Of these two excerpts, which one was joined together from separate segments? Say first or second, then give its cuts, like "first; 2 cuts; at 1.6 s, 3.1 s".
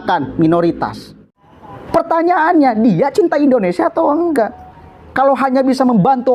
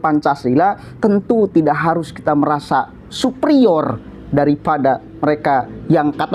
first; 1 cut; at 1.3 s